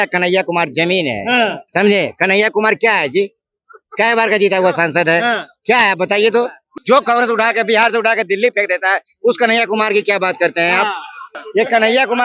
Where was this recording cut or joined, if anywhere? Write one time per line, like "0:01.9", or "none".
0:06.7
0:11.4